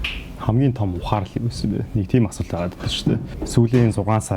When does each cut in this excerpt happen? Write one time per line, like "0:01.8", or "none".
0:03.4